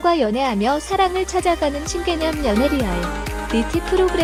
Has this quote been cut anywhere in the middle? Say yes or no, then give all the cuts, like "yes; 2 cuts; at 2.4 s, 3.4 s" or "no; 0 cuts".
no; 0 cuts